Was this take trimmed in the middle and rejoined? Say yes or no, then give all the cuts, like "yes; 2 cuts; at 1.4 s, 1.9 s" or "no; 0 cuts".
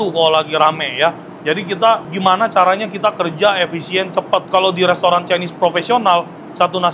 yes; 1 cut; at 2.1 s